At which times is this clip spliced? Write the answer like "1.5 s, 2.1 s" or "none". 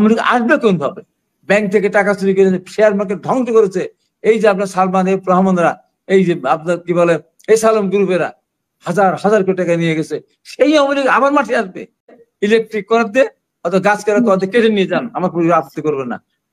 12.3 s